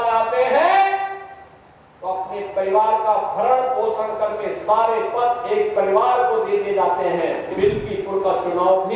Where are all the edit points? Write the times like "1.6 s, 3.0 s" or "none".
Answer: 7.5 s